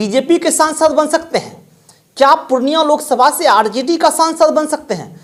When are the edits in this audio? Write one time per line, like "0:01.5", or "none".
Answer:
none

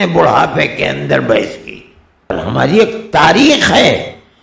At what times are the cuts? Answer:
0:02.3

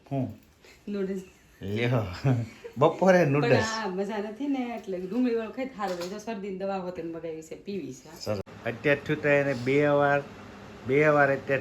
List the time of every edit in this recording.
0:08.5

